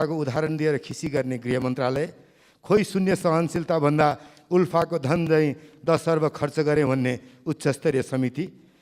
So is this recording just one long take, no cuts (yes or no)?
yes